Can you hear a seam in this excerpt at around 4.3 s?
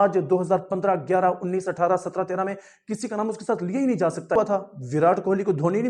yes; 1 cut; at 4.3 s

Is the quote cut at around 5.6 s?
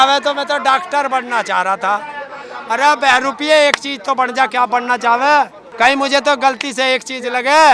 yes; 1 cut; at 5.6 s

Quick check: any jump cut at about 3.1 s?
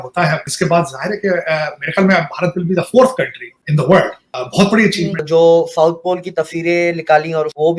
no; 1 cut; at 5.2 s

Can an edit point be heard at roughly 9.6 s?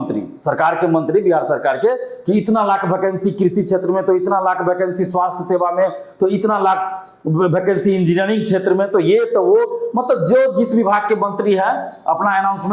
no; 0 cuts

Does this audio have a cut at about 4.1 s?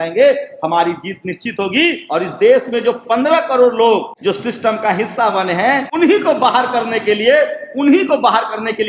yes; 3 cuts; at 2.0 s, 4.1 s, 5.9 s

